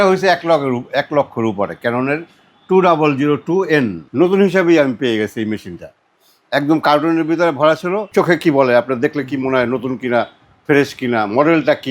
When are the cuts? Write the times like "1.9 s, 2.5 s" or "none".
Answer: 4.0 s, 8.1 s